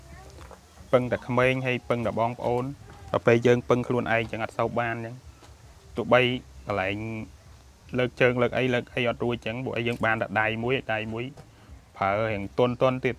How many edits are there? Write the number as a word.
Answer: zero